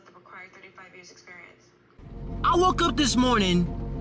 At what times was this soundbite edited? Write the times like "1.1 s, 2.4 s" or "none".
1.9 s